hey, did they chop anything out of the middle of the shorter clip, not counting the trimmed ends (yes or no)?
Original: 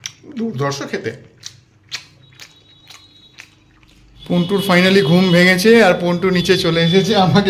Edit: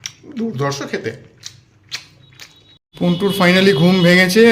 yes